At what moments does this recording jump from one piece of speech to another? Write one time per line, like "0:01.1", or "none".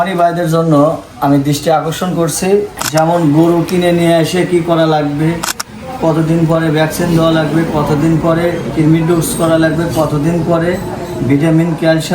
0:02.8